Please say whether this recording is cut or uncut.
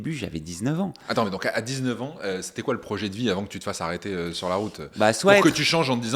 uncut